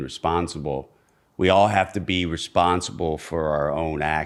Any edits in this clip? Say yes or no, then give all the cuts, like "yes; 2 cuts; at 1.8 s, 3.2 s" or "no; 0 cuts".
no; 0 cuts